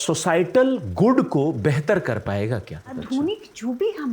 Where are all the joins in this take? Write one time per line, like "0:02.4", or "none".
0:02.9